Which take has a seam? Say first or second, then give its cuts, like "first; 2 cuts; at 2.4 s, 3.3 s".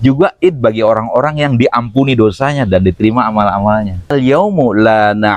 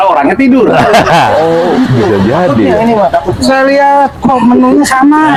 first; 1 cut; at 4.1 s